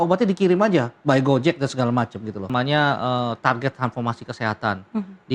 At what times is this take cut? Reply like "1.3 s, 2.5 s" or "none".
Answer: 2.4 s